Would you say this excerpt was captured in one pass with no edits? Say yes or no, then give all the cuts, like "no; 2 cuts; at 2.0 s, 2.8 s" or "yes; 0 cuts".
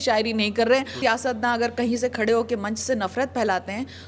no; 1 cut; at 1.0 s